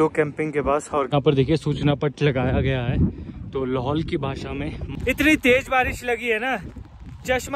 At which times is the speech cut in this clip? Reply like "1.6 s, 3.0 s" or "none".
1.1 s, 4.9 s